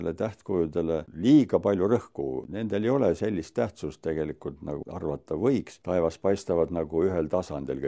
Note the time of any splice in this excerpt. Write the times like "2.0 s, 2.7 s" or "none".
1.1 s, 2.5 s, 4.8 s, 5.7 s